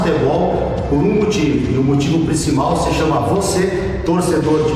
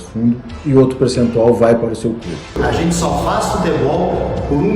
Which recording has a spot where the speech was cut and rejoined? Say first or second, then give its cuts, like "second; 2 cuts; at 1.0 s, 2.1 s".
second; 1 cut; at 2.5 s